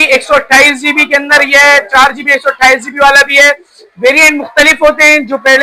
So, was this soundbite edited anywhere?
no; 0 cuts

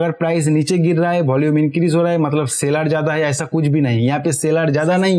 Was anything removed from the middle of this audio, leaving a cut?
no; 0 cuts

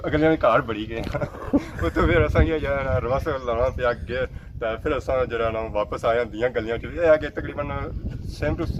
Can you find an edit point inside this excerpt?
no; 0 cuts

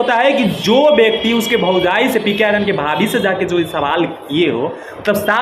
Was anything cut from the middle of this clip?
no; 0 cuts

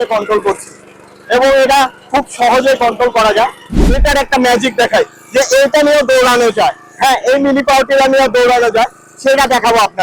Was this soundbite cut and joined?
yes; 1 cut; at 3.9 s

